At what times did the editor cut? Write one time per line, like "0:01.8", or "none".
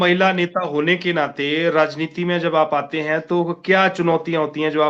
none